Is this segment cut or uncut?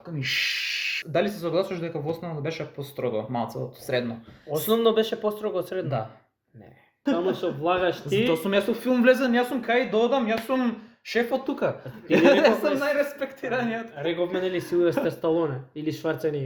cut